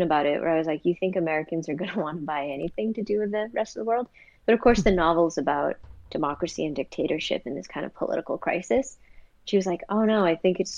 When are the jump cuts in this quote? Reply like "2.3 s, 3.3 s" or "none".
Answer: none

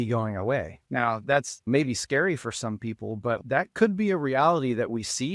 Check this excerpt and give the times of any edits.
1.5 s, 3.4 s

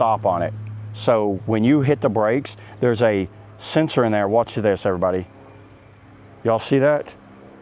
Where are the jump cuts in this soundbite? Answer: none

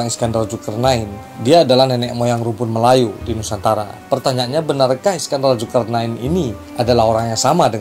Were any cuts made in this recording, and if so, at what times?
none

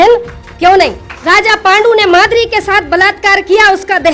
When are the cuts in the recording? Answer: 1.1 s

